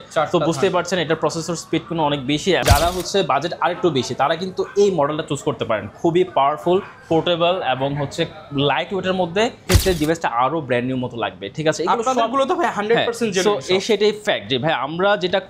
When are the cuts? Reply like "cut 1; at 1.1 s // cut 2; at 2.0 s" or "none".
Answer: cut 1; at 2.6 s // cut 2; at 9.6 s